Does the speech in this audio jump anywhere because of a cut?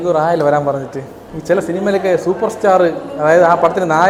no; 0 cuts

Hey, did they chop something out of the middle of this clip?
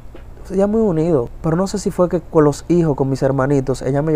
yes; 1 cut; at 1.3 s

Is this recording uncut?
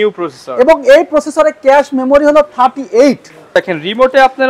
no; 1 cut; at 3.5 s

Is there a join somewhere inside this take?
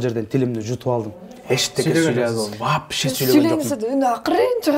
no; 0 cuts

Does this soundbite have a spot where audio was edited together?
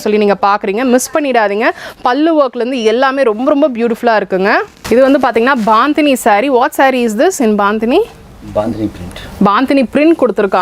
no; 0 cuts

